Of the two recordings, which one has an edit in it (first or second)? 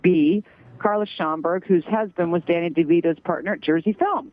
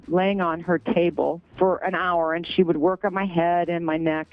second